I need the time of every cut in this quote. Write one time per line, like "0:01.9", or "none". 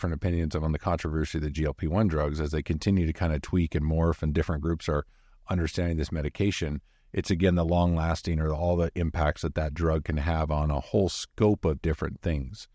none